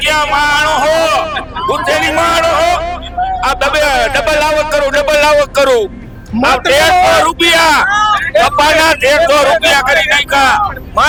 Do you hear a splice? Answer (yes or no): no